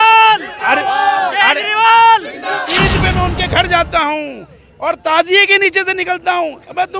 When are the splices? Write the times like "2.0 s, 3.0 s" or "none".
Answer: 2.8 s